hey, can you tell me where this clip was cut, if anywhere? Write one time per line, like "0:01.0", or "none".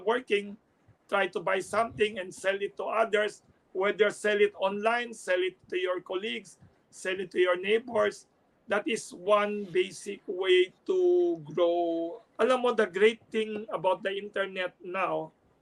0:12.2